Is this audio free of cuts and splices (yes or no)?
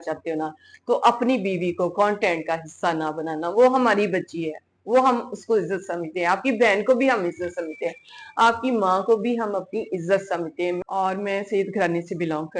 no